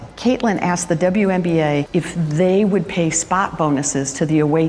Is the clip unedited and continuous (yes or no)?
yes